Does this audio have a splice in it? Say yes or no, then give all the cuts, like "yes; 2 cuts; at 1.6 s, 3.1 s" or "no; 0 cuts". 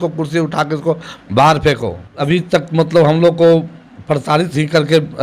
yes; 1 cut; at 2.2 s